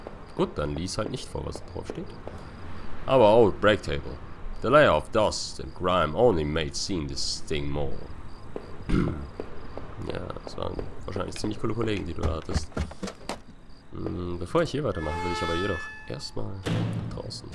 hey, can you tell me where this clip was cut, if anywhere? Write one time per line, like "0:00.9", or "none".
0:10.3